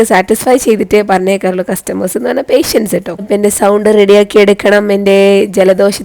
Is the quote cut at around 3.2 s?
yes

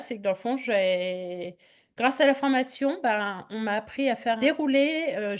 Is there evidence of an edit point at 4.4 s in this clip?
yes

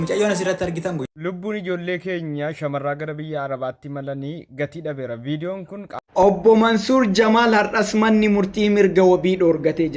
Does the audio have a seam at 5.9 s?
yes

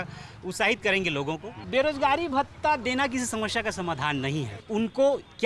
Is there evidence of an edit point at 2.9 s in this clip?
no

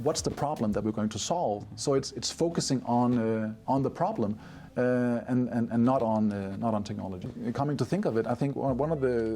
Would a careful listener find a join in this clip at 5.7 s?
no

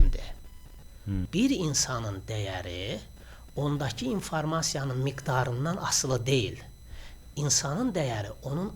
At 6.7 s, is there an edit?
no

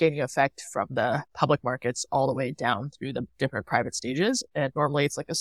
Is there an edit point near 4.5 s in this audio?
yes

